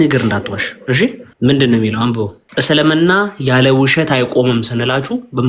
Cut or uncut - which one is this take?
cut